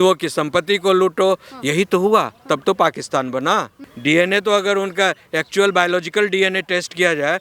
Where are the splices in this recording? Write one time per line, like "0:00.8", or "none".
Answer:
0:03.8